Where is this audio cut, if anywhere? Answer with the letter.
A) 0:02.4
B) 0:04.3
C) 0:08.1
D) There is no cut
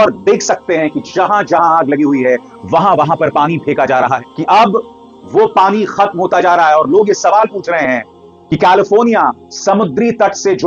B